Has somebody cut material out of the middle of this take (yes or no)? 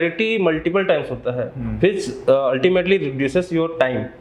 no